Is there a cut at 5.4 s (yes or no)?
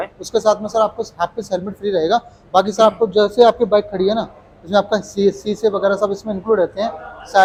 no